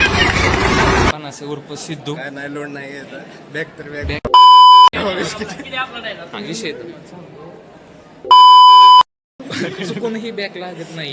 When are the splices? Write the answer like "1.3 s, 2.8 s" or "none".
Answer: 1.1 s